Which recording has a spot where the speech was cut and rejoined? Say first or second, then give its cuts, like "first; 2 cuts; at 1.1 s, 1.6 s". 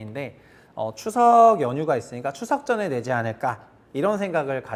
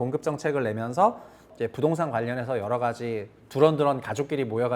second; 1 cut; at 1.5 s